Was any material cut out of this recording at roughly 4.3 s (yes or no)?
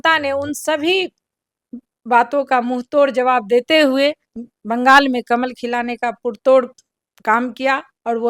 no